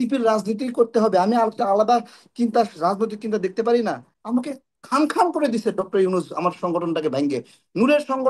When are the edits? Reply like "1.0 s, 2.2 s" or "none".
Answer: 4.1 s